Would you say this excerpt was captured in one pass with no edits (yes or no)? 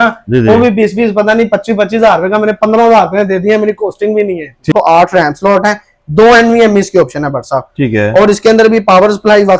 no